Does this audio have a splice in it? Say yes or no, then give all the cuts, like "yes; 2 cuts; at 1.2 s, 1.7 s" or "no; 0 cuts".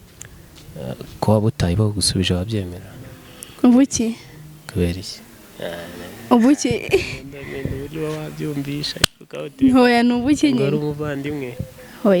no; 0 cuts